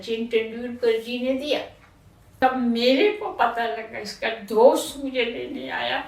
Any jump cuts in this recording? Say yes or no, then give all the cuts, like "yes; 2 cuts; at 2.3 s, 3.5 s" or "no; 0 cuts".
yes; 1 cut; at 2.3 s